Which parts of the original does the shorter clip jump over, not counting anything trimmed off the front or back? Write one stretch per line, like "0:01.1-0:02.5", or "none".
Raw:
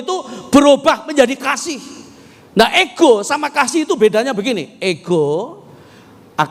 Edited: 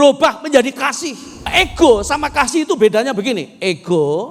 0:02.1-0:02.7